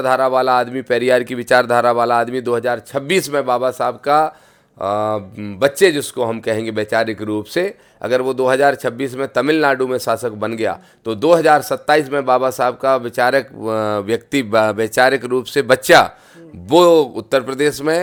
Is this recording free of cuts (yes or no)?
yes